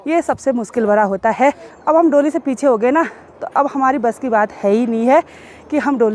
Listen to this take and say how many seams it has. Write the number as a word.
one